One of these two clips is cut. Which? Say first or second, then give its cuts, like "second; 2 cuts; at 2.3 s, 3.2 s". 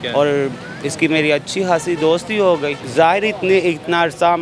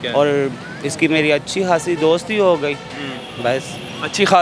first; 1 cut; at 2.8 s